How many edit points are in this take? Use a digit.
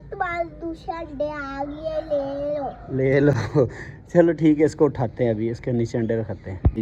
0